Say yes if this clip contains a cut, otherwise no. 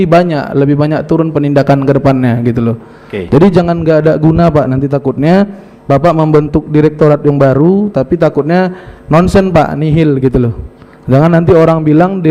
no